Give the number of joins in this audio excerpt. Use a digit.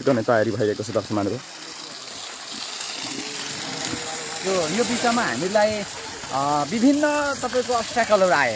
1